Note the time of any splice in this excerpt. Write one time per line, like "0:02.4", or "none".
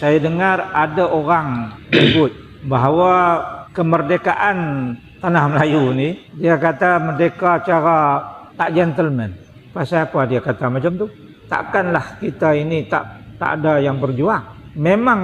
0:09.5